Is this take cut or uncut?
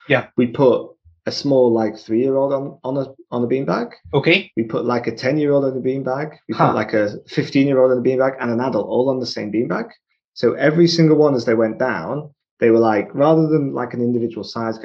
uncut